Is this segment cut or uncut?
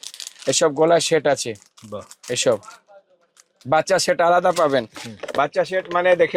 uncut